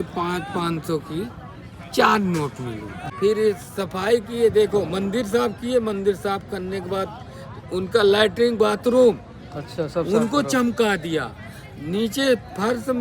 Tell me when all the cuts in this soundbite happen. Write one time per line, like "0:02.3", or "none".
0:02.9